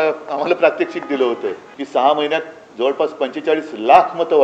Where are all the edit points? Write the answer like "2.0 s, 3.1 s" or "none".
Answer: 1.7 s